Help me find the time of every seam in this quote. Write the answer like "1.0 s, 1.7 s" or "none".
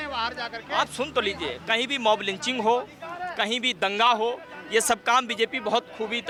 none